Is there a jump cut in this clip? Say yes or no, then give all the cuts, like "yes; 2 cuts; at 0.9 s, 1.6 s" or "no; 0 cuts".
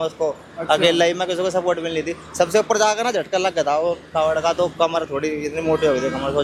no; 0 cuts